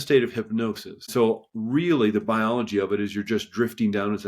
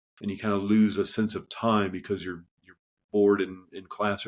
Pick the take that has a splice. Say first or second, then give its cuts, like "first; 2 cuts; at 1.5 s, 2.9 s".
first; 1 cut; at 0.9 s